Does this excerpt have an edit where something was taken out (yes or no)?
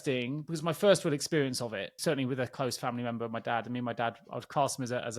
yes